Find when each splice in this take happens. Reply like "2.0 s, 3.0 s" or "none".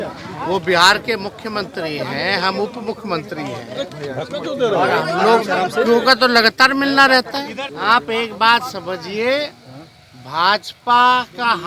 7.6 s